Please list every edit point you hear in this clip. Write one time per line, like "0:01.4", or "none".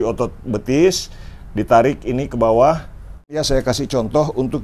0:03.4